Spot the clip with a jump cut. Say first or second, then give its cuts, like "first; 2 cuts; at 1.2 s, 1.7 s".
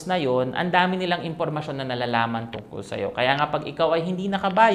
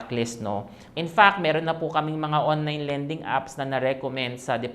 second; 1 cut; at 0.9 s